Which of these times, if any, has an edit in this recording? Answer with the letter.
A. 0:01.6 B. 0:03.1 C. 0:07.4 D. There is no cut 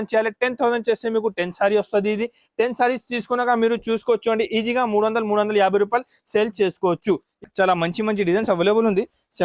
C